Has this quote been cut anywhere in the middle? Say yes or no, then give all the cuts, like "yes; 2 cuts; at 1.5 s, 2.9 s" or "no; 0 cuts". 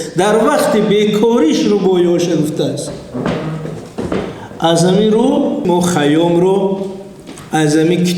yes; 1 cut; at 5.7 s